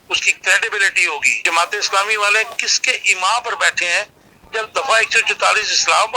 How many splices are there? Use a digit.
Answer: 1